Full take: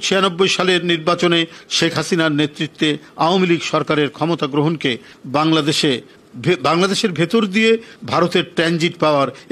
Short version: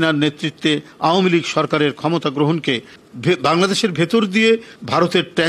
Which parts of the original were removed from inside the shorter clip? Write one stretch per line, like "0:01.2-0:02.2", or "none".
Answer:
0:05.1-0:06.2